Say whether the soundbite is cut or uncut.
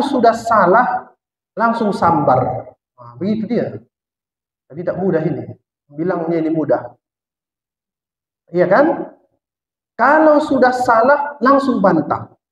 uncut